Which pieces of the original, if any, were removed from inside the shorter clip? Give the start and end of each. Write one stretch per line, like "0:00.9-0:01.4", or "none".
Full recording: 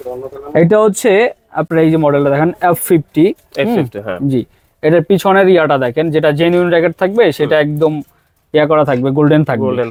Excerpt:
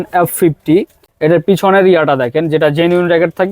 0:03.5-0:04.6